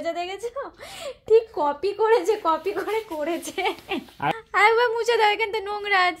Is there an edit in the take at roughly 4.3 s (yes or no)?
yes